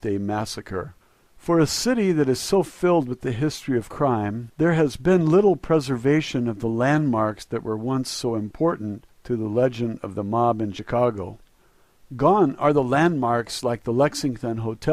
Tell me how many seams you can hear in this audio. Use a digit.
1